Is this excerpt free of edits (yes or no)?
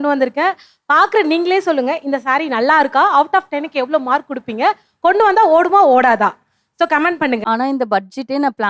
no